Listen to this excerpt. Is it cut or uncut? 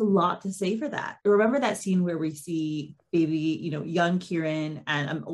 cut